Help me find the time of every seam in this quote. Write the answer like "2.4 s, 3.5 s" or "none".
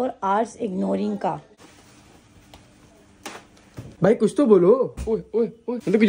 1.5 s